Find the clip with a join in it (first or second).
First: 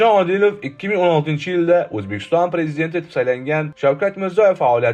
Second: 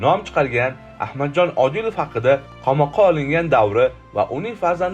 second